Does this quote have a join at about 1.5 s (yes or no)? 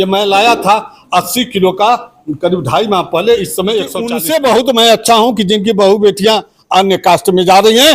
no